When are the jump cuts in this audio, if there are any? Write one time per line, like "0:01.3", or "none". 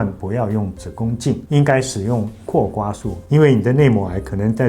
0:01.4
0:03.1